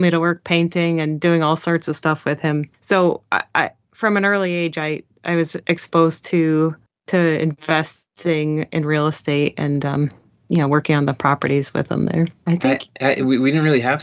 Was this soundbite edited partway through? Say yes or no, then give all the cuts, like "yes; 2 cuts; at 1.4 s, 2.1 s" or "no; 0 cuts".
yes; 1 cut; at 12.4 s